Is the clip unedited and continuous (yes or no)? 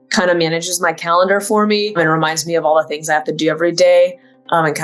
no